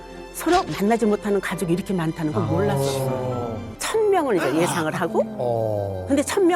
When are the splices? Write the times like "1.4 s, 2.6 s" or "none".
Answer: 3.6 s